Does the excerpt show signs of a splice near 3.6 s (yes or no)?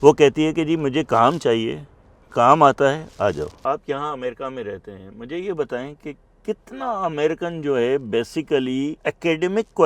yes